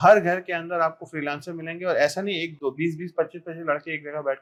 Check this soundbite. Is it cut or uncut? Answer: uncut